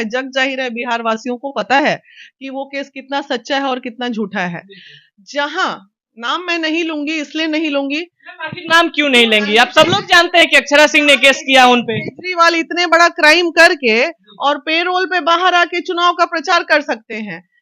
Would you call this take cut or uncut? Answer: uncut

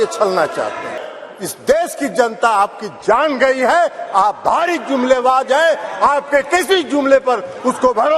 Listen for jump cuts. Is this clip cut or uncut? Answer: cut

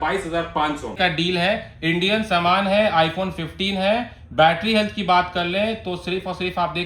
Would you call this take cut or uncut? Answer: cut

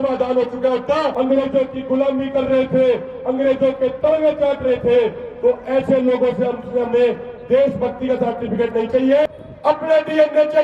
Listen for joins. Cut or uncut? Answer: cut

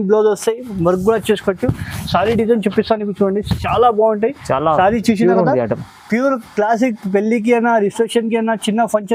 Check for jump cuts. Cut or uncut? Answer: uncut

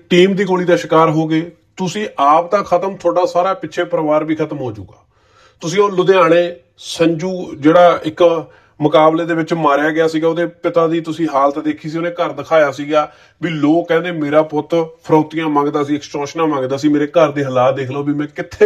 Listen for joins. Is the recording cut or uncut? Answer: uncut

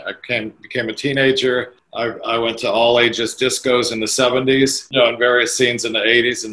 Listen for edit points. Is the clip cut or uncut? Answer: cut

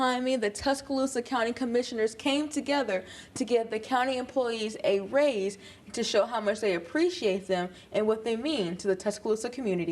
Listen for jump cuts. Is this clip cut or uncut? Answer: uncut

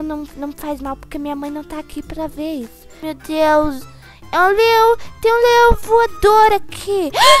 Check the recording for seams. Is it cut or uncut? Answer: cut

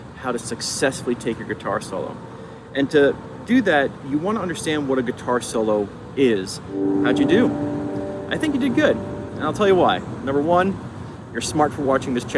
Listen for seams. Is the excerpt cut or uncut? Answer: cut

